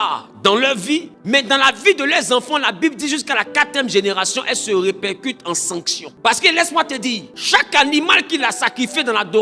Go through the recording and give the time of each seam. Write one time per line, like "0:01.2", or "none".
0:01.1
0:06.0
0:07.3